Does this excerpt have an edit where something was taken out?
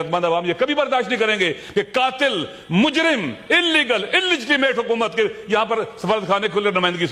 no; 0 cuts

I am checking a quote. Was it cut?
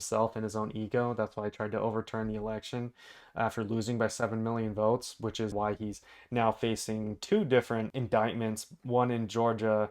yes; 2 cuts; at 5.5 s, 7.9 s

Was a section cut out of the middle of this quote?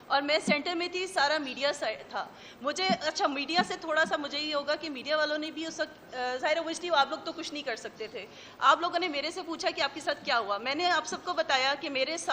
no; 0 cuts

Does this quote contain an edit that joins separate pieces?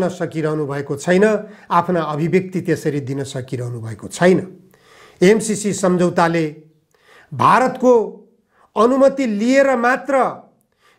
no; 0 cuts

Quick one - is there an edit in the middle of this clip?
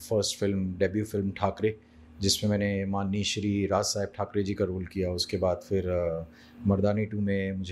no; 0 cuts

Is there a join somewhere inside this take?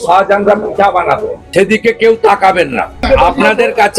yes; 2 cuts; at 1.4 s, 3.1 s

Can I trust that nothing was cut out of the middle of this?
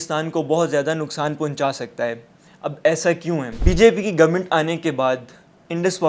no; 1 cut; at 3.5 s

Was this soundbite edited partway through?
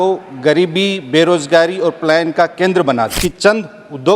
yes; 1 cut; at 3.1 s

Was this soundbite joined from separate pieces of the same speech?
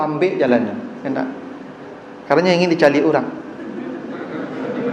no; 0 cuts

